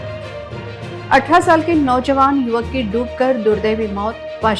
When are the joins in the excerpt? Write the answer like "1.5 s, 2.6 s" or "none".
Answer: 1.0 s